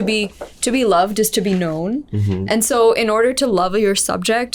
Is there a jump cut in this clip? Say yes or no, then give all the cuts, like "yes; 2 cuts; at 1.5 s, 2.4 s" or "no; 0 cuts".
no; 0 cuts